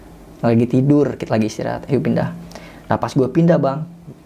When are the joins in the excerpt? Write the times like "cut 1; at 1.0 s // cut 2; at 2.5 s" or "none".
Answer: none